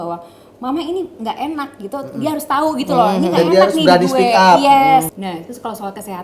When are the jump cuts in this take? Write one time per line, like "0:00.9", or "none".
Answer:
0:05.1